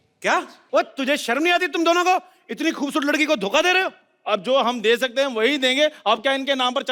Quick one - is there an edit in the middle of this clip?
no; 0 cuts

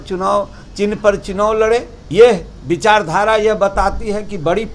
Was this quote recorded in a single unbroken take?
no; 1 cut; at 2.0 s

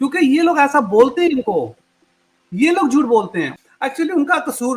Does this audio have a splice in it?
yes; 1 cut; at 3.5 s

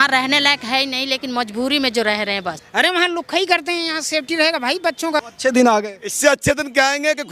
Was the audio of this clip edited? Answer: yes; 2 cuts; at 2.6 s, 5.2 s

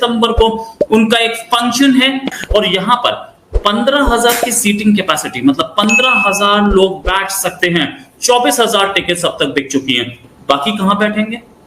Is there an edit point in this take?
yes; 1 cut; at 2.3 s

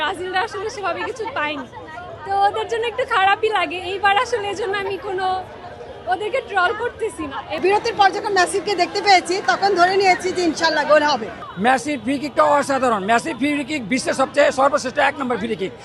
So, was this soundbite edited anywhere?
yes; 2 cuts; at 7.6 s, 11.4 s

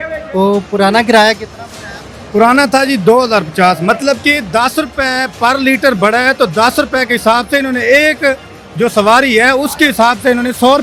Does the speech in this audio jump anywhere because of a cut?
no; 0 cuts

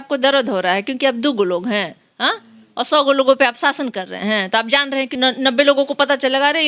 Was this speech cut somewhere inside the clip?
yes; 1 cut; at 5.2 s

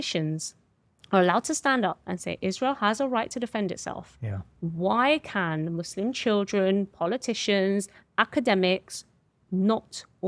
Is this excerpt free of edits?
yes; 0 cuts

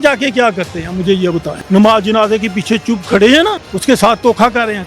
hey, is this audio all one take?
no; 2 cuts; at 1.5 s, 3.7 s

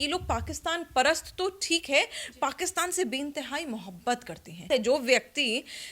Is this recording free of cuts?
no; 1 cut; at 4.7 s

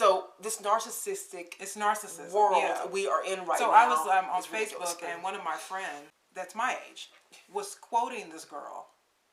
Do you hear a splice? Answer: no; 0 cuts

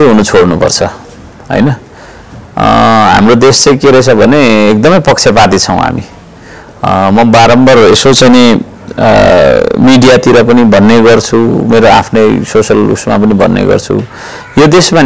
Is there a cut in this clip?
no; 0 cuts

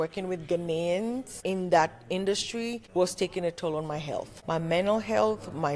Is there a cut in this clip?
yes; 3 cuts; at 1.3 s, 2.8 s, 4.3 s

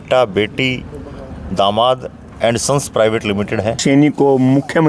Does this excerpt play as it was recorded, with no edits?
no; 1 cut; at 3.8 s

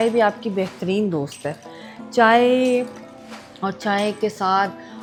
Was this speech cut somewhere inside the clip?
no; 0 cuts

